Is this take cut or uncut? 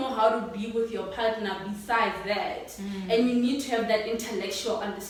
uncut